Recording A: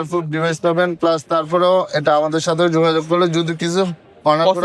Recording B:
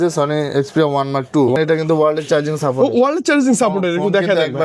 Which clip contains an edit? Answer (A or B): B